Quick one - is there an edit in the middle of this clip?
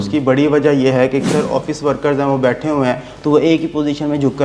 yes; 1 cut; at 1.2 s

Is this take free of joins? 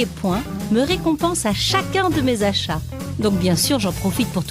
yes; 0 cuts

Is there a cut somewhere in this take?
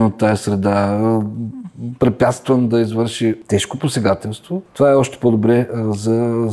yes; 2 cuts; at 3.4 s, 4.7 s

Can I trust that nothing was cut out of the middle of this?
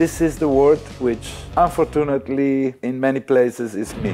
no; 2 cuts; at 1.3 s, 2.8 s

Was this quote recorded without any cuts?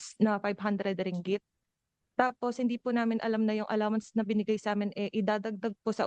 yes; 0 cuts

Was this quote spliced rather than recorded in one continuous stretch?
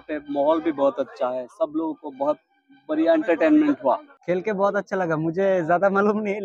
yes; 1 cut; at 4.1 s

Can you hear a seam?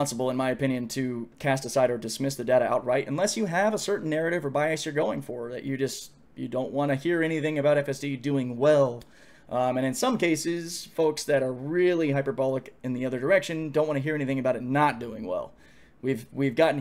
no; 0 cuts

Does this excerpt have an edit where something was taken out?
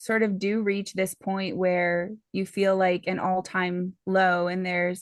no; 0 cuts

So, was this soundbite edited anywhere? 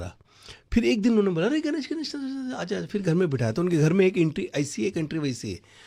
no; 0 cuts

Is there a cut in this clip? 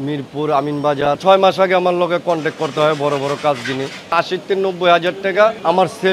yes; 2 cuts; at 1.2 s, 4.1 s

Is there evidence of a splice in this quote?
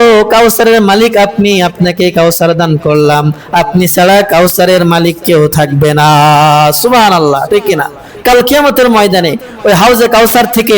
no; 0 cuts

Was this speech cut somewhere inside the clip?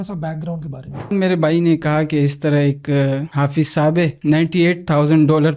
yes; 2 cuts; at 1.1 s, 4.2 s

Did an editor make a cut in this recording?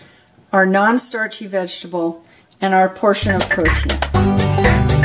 yes; 1 cut; at 3.9 s

